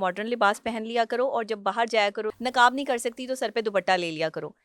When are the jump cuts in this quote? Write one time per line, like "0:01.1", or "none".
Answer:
0:02.3